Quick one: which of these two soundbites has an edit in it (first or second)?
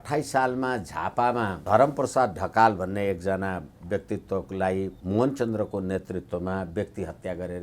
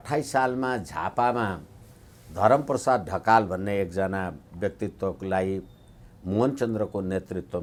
first